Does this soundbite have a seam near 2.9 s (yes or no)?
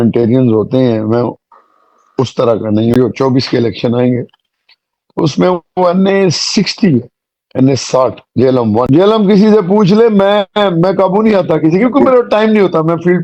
yes